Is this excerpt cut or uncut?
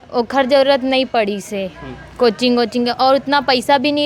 uncut